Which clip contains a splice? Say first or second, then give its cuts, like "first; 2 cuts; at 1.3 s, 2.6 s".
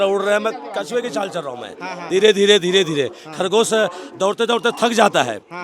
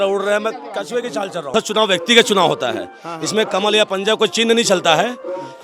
second; 1 cut; at 1.5 s